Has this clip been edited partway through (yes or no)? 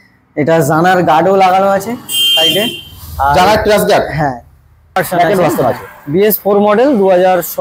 yes